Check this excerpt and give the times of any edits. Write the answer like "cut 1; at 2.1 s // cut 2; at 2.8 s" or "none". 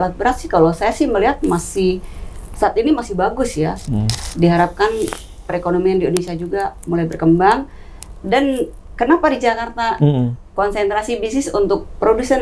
cut 1; at 4.2 s

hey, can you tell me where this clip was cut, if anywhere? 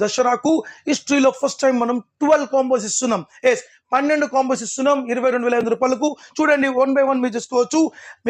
none

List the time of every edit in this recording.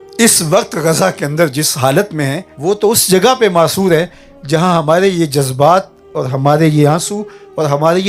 cut 1; at 2.5 s

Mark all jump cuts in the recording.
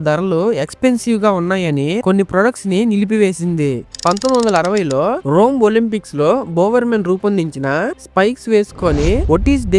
cut 1; at 3.9 s

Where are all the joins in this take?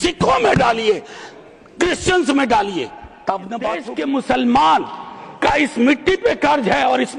cut 1; at 3.9 s

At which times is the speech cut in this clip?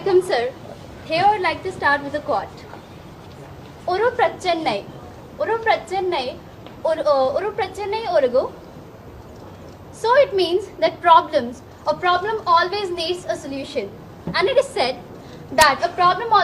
none

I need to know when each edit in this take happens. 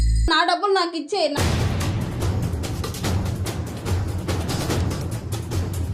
cut 1; at 1.4 s

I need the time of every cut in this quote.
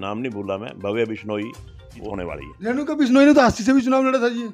cut 1; at 2.1 s

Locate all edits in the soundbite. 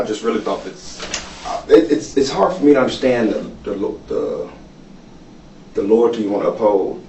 none

